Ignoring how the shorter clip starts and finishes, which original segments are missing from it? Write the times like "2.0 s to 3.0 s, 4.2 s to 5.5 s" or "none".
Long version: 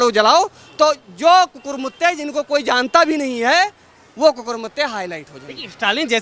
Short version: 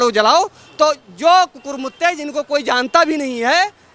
none